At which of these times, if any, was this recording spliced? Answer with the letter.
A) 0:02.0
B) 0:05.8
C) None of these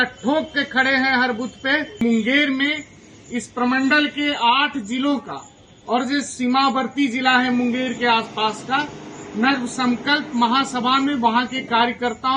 A